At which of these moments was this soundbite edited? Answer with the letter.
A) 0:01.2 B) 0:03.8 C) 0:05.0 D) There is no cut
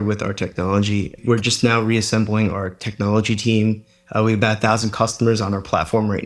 A